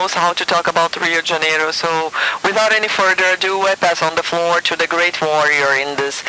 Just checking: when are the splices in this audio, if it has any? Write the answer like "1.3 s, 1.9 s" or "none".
3.9 s